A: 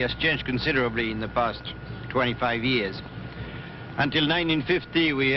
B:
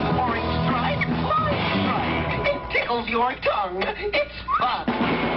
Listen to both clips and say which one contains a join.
B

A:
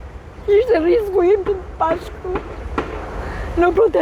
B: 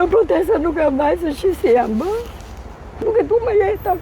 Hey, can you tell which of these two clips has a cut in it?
B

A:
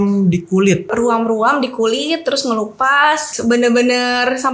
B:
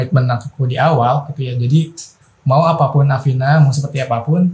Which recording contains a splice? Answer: A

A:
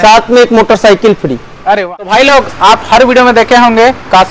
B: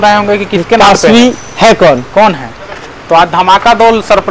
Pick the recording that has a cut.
A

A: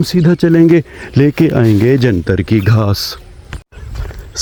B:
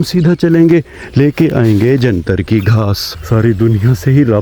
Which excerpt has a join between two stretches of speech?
B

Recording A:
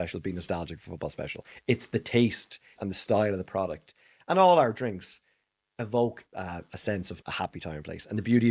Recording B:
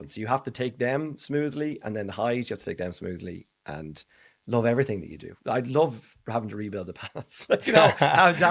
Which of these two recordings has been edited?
A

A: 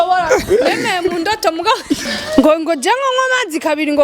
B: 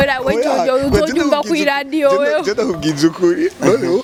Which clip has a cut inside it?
A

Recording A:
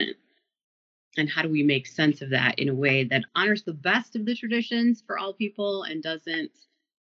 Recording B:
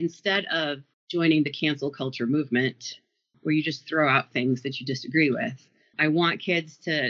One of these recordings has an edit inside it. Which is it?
A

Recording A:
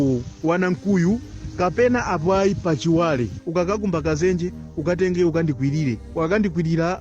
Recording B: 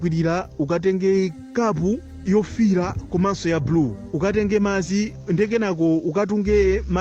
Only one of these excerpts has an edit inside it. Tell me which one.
A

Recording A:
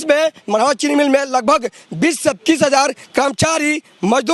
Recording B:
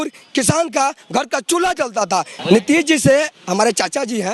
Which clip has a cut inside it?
B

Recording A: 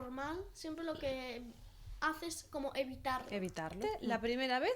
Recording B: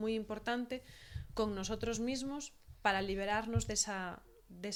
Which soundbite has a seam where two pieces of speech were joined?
A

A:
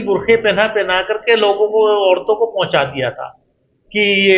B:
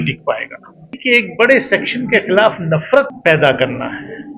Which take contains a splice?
B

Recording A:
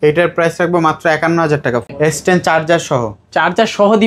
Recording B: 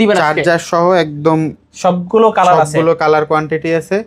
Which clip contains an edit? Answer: A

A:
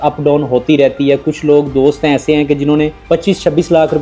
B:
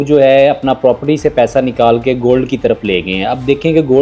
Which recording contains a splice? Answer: A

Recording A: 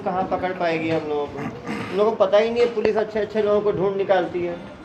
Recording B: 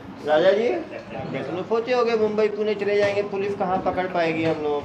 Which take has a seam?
B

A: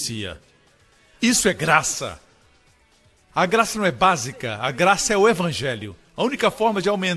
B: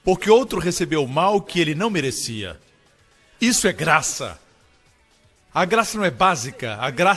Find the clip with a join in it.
A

